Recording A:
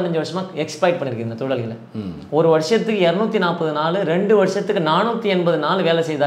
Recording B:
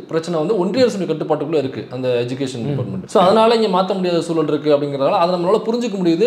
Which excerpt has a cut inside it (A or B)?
B